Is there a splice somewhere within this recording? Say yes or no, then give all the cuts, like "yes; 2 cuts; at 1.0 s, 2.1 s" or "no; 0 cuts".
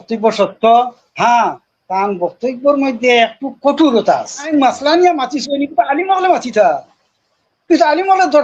yes; 2 cuts; at 1.0 s, 4.5 s